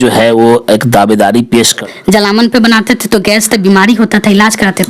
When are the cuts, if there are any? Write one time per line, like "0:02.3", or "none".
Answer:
0:01.8